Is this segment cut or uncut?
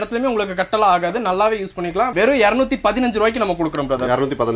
uncut